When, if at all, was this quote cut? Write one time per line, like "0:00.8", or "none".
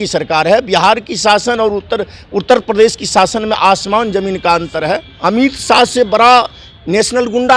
0:05.1